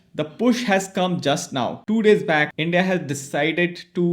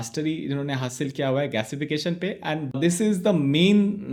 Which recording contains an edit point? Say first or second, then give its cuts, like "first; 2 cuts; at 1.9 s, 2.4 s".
first; 2 cuts; at 1.8 s, 2.5 s